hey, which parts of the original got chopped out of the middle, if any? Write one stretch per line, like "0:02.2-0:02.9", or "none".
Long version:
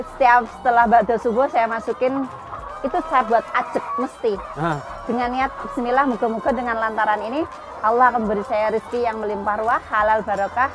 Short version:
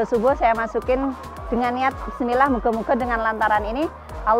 0:02.5-0:04.9